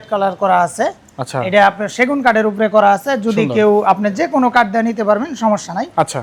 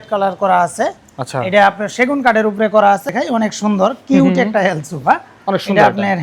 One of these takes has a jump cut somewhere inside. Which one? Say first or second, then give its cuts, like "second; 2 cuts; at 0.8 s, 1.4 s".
second; 1 cut; at 3.1 s